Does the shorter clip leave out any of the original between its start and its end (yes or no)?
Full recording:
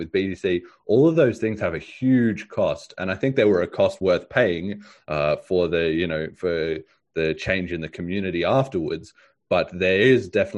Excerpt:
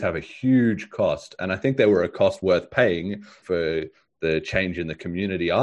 yes